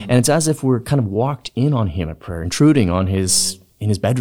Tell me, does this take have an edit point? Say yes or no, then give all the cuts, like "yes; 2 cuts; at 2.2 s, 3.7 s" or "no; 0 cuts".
no; 0 cuts